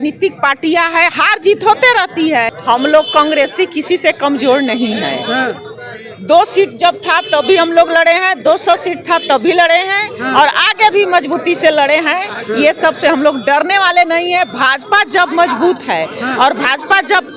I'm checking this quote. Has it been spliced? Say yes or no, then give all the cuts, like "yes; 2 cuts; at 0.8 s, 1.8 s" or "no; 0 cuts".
yes; 1 cut; at 2.5 s